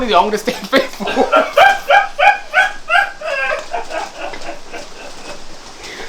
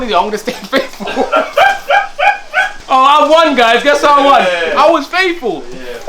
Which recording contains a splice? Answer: second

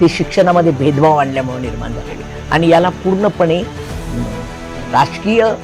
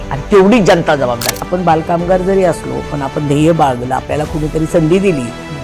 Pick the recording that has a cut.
second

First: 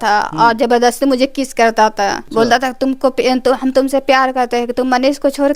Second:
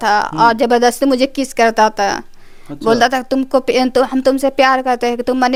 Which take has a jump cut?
first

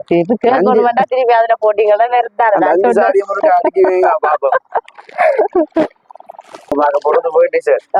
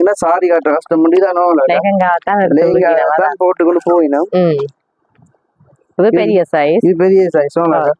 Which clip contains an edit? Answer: first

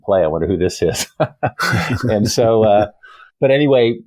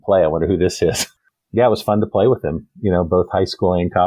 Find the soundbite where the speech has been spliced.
second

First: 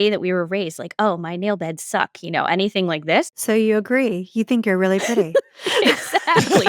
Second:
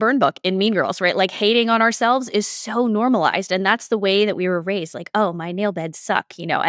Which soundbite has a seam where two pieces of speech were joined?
first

